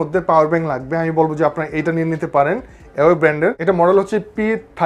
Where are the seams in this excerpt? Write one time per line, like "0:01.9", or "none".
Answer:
none